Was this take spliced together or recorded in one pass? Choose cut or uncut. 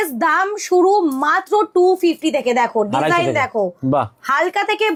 uncut